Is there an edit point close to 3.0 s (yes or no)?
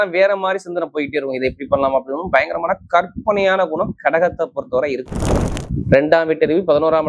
no